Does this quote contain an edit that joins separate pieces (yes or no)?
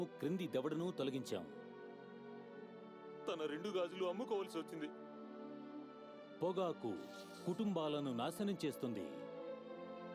no